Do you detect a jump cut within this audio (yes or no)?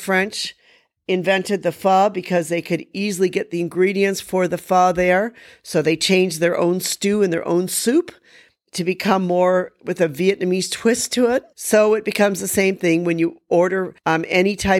yes